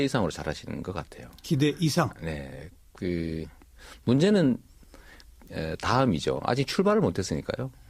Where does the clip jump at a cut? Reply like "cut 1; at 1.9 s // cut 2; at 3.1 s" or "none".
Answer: none